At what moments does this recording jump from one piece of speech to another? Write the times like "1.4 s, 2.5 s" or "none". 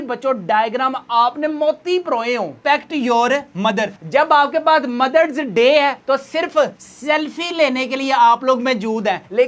2.5 s